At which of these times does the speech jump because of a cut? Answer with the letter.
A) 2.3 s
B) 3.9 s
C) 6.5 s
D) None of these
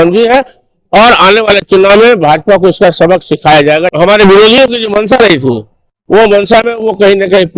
B